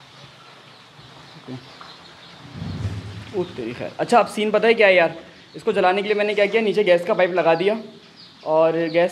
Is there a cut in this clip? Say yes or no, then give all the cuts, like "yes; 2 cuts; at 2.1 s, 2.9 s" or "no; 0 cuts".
no; 0 cuts